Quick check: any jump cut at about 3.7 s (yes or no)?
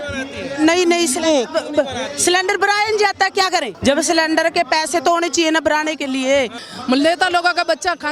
yes